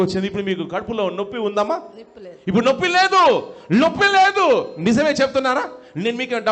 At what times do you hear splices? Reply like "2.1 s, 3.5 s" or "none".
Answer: none